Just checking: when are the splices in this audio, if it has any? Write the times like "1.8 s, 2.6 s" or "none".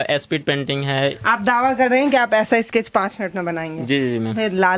1.2 s